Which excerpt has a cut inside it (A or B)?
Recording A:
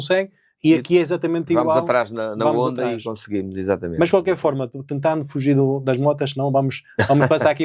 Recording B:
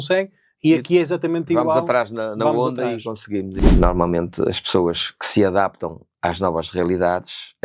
B